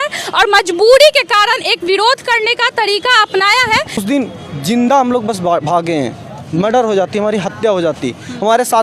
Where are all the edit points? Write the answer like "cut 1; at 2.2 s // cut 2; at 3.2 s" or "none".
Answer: cut 1; at 4.0 s